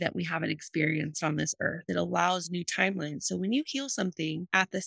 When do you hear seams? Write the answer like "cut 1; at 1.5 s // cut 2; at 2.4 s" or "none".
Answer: cut 1; at 1.8 s